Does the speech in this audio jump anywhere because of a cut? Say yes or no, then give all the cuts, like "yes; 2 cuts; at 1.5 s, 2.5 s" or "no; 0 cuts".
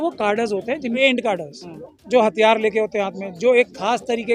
yes; 1 cut; at 1.0 s